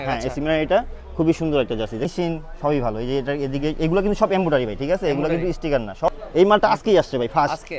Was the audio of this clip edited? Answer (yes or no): yes